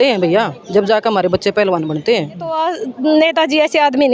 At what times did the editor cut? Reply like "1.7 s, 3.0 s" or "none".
2.6 s